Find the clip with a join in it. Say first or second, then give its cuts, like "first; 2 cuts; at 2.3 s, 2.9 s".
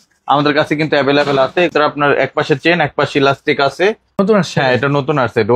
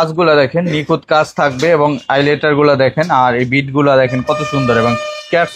first; 2 cuts; at 1.7 s, 4.2 s